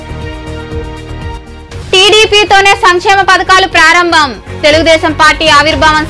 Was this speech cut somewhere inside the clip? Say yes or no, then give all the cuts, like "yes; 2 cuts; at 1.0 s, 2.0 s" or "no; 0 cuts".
yes; 1 cut; at 1.4 s